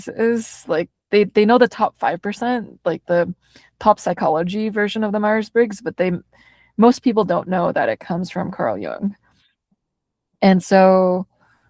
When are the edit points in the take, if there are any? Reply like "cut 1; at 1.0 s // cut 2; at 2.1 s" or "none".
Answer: none

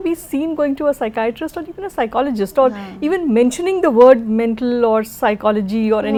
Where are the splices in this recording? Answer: none

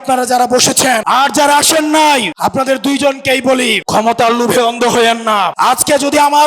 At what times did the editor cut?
cut 1; at 1.0 s // cut 2; at 2.3 s // cut 3; at 3.8 s // cut 4; at 5.5 s

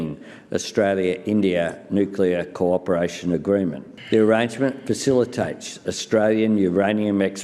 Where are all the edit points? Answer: cut 1; at 3.9 s

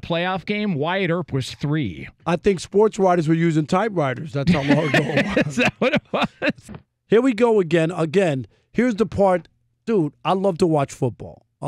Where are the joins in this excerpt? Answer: cut 1; at 6.6 s

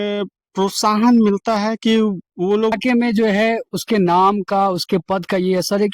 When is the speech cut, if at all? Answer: cut 1; at 2.8 s

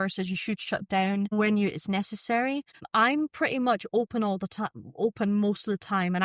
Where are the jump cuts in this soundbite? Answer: cut 1; at 1.3 s // cut 2; at 2.9 s

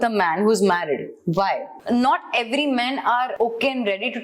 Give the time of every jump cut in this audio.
cut 1; at 1.7 s // cut 2; at 3.3 s

